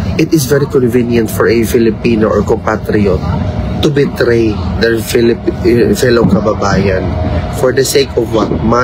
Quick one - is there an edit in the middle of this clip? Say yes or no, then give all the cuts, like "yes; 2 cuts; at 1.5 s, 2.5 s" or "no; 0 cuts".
no; 0 cuts